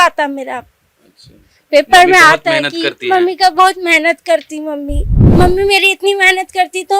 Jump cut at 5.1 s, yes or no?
yes